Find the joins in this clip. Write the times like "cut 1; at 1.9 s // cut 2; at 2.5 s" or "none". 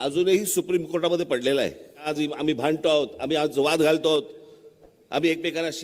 cut 1; at 2.1 s